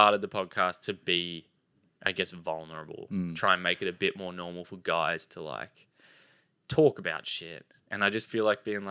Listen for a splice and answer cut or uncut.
uncut